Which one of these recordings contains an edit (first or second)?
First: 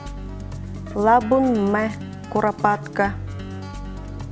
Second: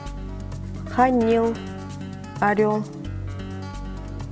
second